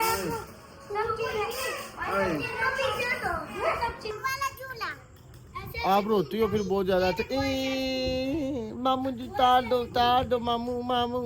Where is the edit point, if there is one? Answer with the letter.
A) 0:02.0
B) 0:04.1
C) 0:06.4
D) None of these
B